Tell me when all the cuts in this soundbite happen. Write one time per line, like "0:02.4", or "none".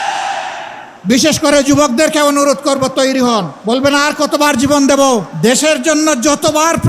none